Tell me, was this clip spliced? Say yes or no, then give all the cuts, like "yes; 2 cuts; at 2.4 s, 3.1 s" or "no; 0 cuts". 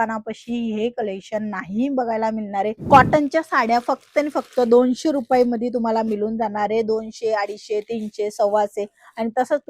yes; 1 cut; at 2.8 s